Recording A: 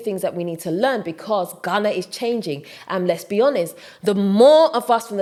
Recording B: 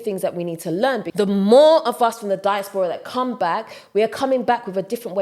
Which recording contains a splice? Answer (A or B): B